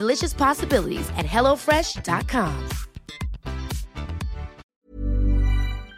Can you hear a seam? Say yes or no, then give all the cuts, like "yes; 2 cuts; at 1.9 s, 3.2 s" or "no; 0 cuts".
yes; 1 cut; at 4.6 s